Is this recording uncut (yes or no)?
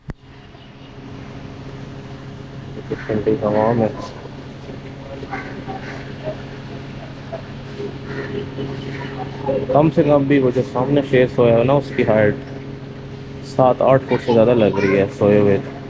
yes